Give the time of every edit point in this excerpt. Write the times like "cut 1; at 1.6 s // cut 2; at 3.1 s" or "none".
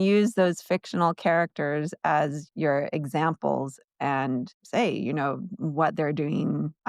cut 1; at 2.4 s // cut 2; at 4.6 s